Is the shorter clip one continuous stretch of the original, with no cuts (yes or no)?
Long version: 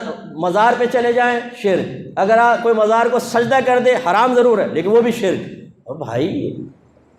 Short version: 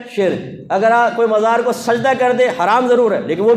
yes